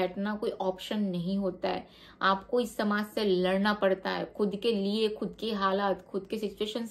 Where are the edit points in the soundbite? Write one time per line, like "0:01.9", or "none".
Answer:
none